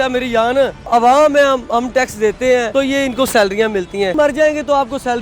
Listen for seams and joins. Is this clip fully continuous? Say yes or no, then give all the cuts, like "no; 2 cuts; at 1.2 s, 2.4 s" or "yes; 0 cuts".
no; 3 cuts; at 0.9 s, 2.7 s, 4.1 s